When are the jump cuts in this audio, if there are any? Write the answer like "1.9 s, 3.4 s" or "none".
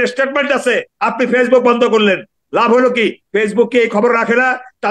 0.9 s

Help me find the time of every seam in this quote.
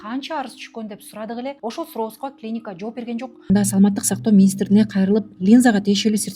1.6 s, 3.5 s

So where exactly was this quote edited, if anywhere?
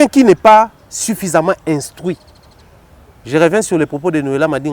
none

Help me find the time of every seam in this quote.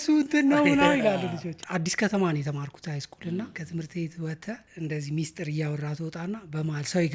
1.6 s, 3.6 s, 4.7 s

